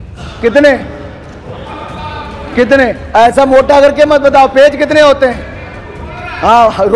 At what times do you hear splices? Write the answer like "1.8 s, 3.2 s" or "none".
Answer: none